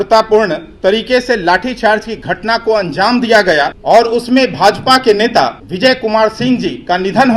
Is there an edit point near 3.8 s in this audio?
yes; 2 cuts; at 3.8 s, 5.6 s

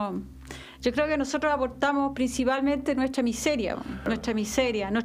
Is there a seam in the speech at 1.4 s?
no; 1 cut; at 4.0 s

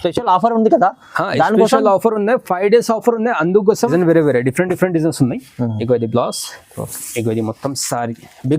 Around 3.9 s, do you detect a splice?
yes; 1 cut; at 3.9 s

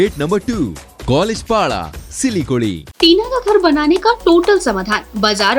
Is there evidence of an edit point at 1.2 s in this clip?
no; 1 cut; at 2.9 s

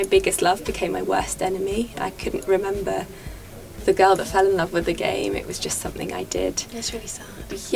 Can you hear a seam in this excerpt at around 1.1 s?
no; 0 cuts

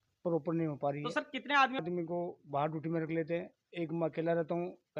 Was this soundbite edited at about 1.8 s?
yes; 1 cut; at 1.8 s

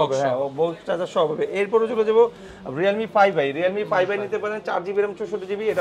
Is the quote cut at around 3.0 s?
no; 0 cuts

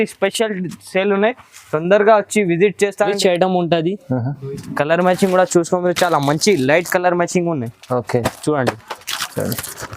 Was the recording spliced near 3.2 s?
yes; 1 cut; at 3.2 s

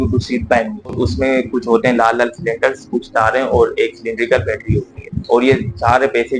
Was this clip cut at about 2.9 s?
no; 2 cuts; at 1.0 s, 5.1 s

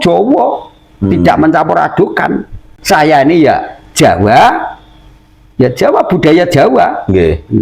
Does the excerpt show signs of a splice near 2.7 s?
yes; 1 cut; at 2.7 s

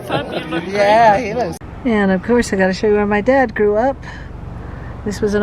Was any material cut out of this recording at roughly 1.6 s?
yes; 1 cut; at 1.6 s

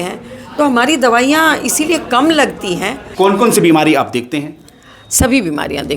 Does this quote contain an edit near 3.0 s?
yes; 1 cut; at 3.0 s

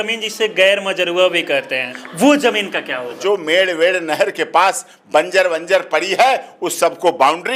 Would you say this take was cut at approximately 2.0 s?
yes; 2 cuts; at 2.0 s, 3.2 s

